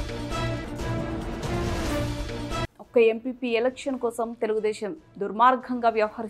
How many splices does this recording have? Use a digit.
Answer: 1